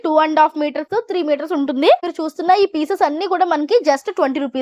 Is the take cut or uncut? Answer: cut